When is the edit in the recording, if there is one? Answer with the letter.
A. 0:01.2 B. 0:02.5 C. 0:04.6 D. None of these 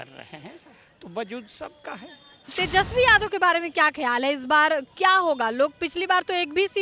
B